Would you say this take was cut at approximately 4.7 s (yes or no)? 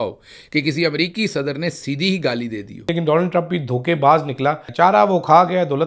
yes